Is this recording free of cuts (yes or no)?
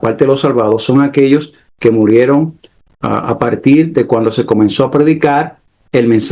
yes